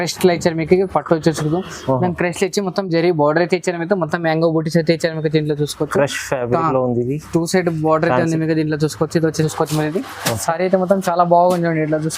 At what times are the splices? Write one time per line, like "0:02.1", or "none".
0:09.4